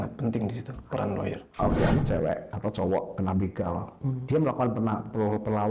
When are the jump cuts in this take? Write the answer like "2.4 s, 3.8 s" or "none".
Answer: 1.9 s